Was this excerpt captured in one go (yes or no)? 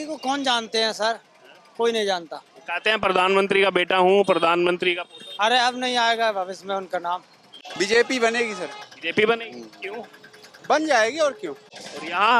no